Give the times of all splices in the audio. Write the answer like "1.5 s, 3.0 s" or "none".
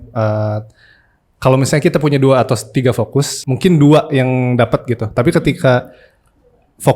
3.4 s